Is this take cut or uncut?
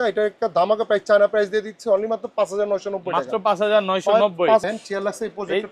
cut